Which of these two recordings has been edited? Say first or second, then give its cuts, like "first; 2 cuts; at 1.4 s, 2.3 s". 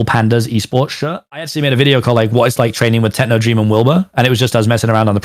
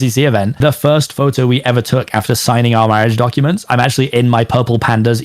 first; 1 cut; at 1.4 s